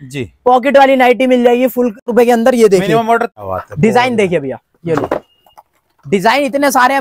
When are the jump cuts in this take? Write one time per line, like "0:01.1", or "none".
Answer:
0:02.1
0:03.4